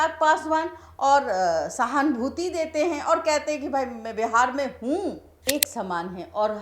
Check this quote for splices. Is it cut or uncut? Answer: cut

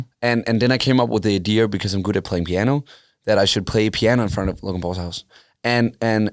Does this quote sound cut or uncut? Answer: uncut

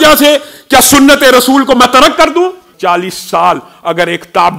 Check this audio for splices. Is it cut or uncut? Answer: cut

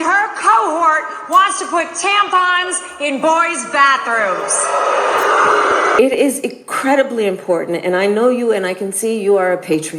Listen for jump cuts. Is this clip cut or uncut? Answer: cut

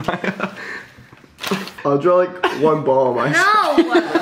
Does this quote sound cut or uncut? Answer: uncut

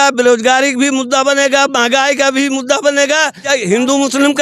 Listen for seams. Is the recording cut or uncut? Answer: cut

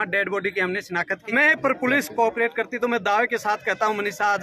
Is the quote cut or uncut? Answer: cut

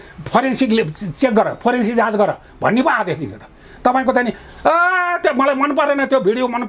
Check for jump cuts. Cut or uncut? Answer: uncut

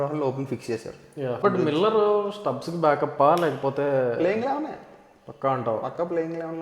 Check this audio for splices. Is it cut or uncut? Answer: cut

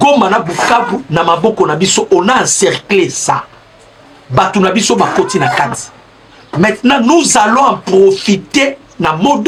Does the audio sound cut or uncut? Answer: uncut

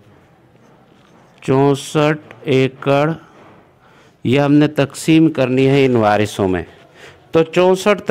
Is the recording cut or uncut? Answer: uncut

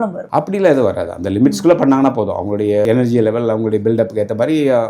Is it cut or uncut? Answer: cut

